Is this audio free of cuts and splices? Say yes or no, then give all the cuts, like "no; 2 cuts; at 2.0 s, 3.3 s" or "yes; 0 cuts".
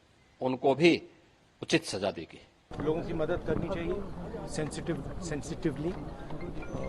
no; 1 cut; at 2.7 s